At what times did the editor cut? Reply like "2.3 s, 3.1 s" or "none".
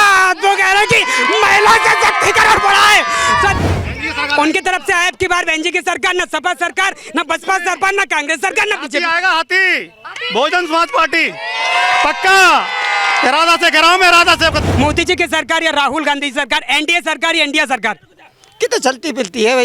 3.6 s, 14.6 s